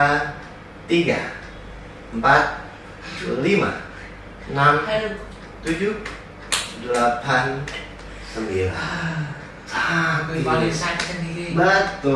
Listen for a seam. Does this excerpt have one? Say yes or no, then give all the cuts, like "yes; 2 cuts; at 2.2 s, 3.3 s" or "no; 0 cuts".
no; 0 cuts